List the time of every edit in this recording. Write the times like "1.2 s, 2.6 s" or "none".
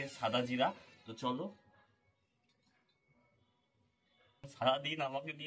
4.5 s